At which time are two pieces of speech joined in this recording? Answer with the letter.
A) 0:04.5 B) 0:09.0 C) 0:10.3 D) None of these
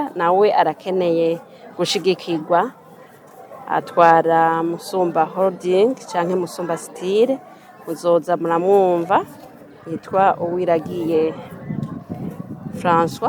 D